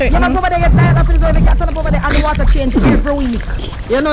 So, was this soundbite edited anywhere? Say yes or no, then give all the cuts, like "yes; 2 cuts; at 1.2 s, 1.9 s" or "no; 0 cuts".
no; 0 cuts